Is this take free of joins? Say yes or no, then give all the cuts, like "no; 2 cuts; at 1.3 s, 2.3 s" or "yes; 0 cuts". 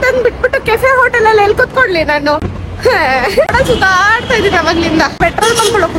no; 3 cuts; at 2.6 s, 3.5 s, 5.2 s